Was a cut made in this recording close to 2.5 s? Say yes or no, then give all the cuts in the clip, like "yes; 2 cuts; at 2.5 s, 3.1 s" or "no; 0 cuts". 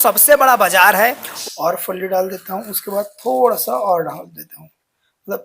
no; 1 cut; at 1.3 s